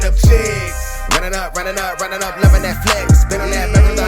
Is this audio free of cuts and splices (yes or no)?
yes